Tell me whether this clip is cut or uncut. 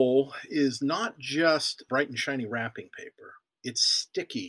cut